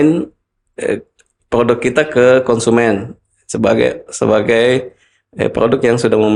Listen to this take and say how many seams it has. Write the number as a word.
zero